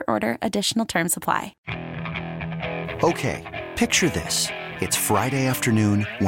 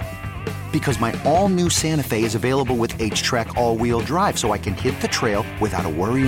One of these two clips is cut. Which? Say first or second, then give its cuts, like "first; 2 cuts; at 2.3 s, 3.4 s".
first; 1 cut; at 1.6 s